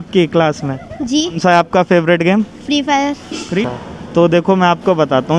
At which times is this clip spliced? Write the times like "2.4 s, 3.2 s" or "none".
1.4 s, 3.6 s